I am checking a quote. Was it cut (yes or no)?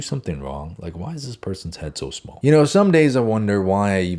yes